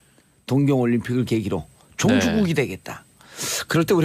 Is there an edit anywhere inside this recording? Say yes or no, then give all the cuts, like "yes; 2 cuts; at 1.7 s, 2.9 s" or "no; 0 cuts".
yes; 1 cut; at 1.4 s